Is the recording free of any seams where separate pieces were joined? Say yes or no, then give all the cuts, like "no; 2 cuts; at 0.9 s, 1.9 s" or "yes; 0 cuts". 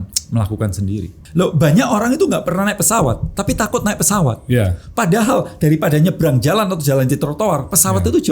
no; 1 cut; at 1.2 s